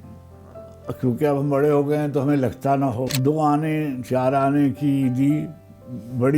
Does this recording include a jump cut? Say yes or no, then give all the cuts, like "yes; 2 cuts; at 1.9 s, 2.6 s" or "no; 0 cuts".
yes; 1 cut; at 3.1 s